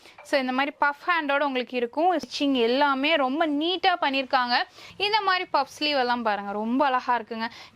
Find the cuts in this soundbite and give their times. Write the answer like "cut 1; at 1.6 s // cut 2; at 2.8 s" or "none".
cut 1; at 2.2 s // cut 2; at 4.8 s